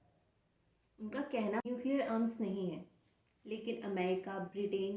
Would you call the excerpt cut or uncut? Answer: cut